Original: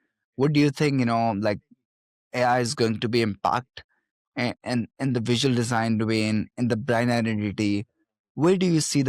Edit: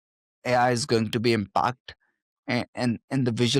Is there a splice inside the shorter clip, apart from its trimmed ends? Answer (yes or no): no